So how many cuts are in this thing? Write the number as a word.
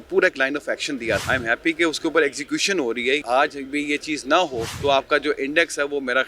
three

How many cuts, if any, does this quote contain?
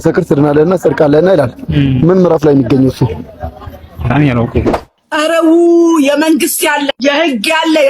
one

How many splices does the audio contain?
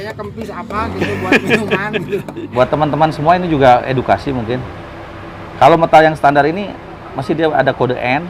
one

